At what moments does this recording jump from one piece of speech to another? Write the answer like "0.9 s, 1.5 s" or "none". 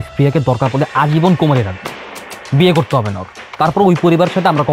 none